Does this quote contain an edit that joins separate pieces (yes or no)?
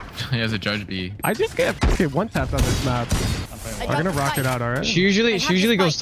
yes